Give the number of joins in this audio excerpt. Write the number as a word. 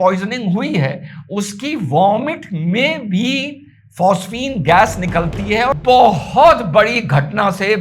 one